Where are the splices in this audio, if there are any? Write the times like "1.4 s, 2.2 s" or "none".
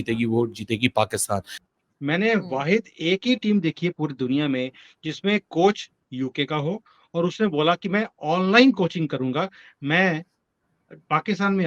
1.6 s